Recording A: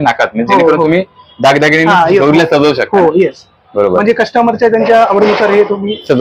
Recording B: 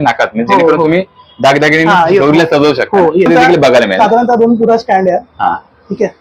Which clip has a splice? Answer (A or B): B